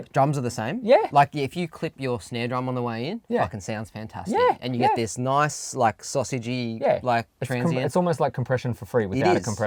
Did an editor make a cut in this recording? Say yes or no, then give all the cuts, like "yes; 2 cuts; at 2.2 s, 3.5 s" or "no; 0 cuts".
no; 0 cuts